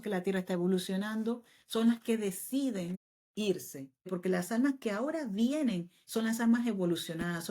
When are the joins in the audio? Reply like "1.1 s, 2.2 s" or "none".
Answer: 4.1 s